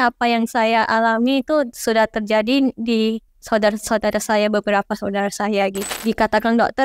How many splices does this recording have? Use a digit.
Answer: 2